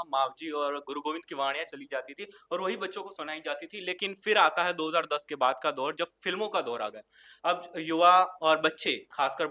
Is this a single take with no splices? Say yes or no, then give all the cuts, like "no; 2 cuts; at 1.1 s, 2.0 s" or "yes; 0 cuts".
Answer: yes; 0 cuts